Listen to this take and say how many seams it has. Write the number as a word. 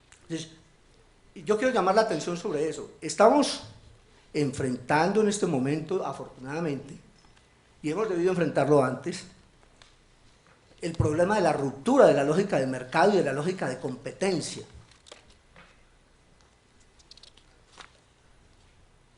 one